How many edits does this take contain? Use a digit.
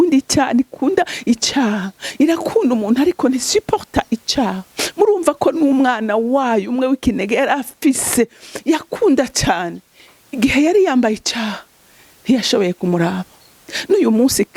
0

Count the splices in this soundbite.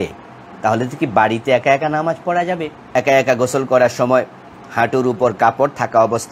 1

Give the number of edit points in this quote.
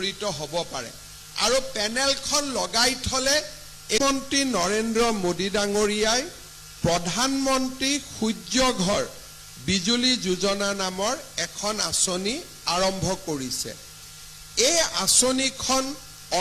1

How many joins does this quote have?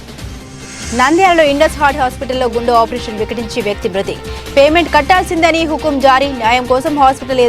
1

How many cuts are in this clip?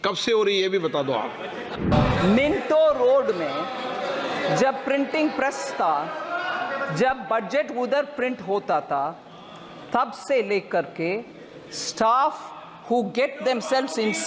1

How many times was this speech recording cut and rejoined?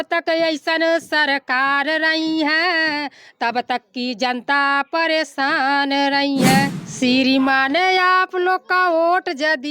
1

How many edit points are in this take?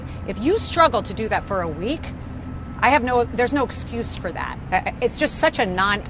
1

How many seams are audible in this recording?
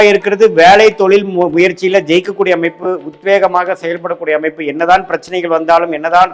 0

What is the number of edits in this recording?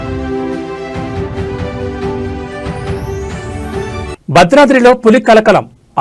1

